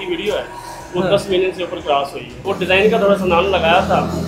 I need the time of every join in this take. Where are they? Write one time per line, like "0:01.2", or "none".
0:02.5